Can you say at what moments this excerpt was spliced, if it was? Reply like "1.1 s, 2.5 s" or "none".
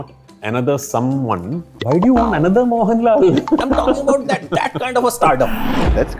1.7 s